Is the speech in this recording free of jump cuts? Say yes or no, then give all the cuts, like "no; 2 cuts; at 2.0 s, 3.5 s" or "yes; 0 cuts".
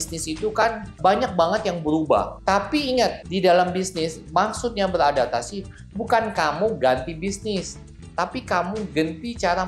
no; 1 cut; at 0.9 s